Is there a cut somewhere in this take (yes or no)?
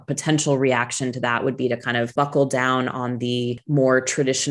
yes